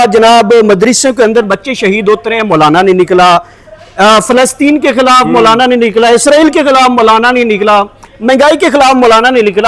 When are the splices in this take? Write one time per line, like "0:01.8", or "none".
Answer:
none

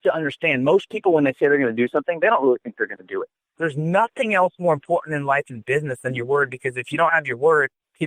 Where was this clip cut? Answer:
none

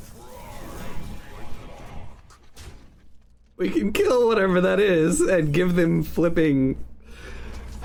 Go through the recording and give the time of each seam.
none

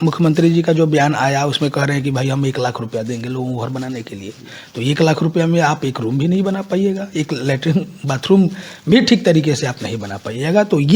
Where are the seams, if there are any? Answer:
none

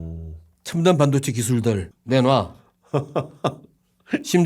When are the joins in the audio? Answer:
0:01.9

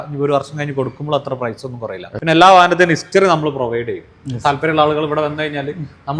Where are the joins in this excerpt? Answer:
0:02.1

